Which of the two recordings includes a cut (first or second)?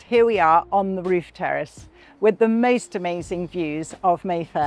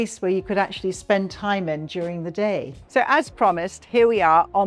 second